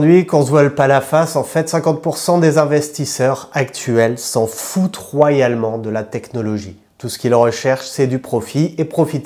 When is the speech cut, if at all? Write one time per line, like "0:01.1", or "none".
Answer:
0:06.9